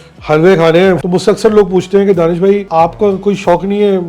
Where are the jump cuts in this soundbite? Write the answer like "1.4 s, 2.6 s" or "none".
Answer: 1.0 s, 2.6 s